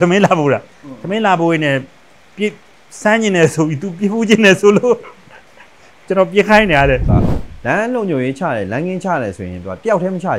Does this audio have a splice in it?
yes; 1 cut; at 7.1 s

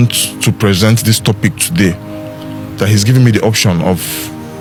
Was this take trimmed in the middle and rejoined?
no; 0 cuts

